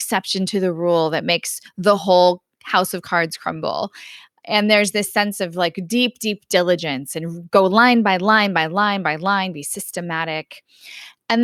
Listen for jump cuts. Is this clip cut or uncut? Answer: uncut